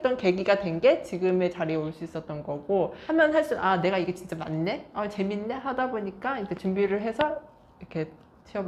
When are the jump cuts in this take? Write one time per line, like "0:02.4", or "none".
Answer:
0:03.0